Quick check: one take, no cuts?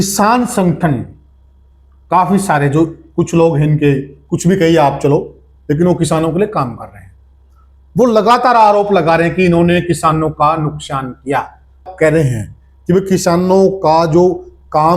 no; 1 cut; at 11.8 s

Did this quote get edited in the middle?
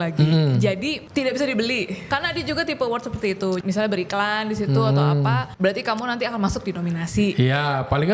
yes; 4 cuts; at 1.0 s, 2.1 s, 3.6 s, 5.5 s

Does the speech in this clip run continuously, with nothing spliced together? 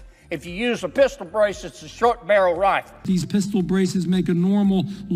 no; 1 cut; at 2.9 s

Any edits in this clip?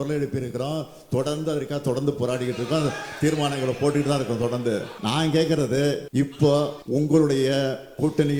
yes; 3 cuts; at 4.9 s, 6.0 s, 6.8 s

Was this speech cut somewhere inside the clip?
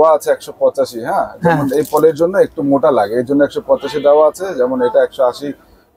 no; 0 cuts

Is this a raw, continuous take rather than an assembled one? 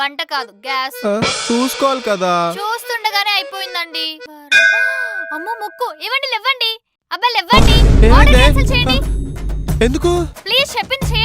no; 1 cut; at 4.3 s

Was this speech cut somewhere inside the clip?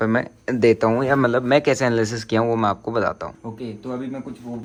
no; 0 cuts

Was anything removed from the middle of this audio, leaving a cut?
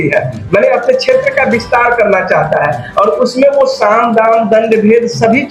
no; 0 cuts

